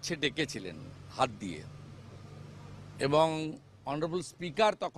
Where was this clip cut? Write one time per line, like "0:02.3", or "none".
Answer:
none